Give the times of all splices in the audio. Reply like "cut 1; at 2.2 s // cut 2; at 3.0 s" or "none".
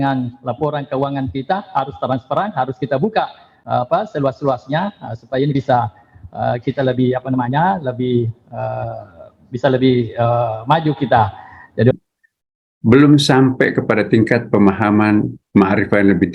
cut 1; at 11.9 s